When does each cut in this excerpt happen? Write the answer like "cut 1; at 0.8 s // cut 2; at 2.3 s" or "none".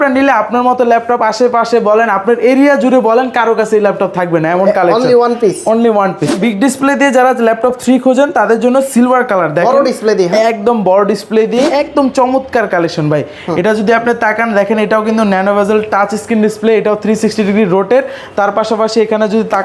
cut 1; at 6.4 s // cut 2; at 11.7 s